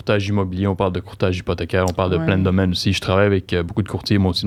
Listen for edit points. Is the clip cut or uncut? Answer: uncut